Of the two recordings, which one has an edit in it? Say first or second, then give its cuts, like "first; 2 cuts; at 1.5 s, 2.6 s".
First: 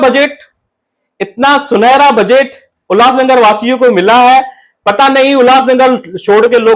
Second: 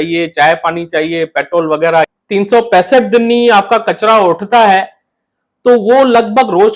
second; 1 cut; at 2.2 s